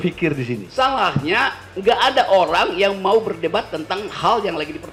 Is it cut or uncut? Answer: uncut